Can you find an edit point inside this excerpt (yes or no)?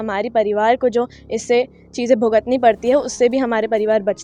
no